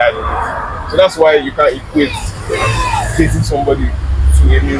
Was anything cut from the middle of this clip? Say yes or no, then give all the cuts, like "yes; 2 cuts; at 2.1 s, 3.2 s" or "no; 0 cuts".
no; 0 cuts